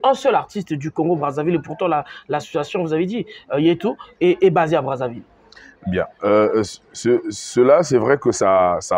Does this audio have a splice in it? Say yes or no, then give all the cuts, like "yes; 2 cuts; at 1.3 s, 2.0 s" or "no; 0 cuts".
no; 0 cuts